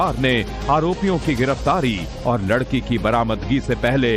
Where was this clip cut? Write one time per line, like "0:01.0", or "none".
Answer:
0:02.4